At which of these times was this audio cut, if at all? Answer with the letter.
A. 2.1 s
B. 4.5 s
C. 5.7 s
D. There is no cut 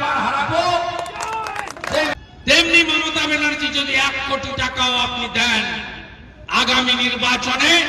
A